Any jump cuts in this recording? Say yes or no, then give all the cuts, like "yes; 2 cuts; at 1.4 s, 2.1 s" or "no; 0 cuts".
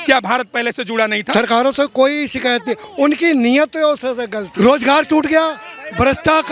yes; 2 cuts; at 1.2 s, 4.4 s